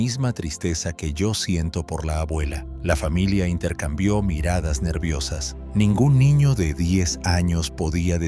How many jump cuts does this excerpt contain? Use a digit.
1